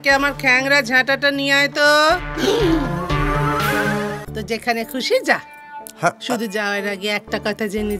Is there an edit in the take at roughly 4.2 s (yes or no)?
yes